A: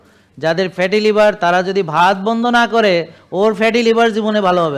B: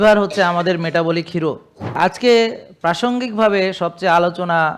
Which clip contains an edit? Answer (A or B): B